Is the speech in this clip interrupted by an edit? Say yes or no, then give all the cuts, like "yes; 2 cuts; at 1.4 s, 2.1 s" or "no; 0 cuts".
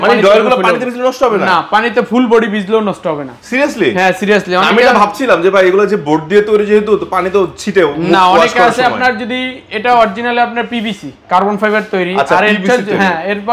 no; 0 cuts